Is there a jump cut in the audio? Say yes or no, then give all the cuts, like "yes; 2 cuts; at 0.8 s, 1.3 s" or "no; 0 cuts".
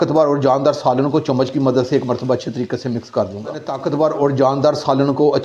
no; 0 cuts